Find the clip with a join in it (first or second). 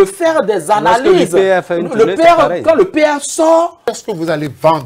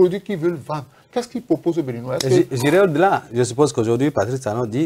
first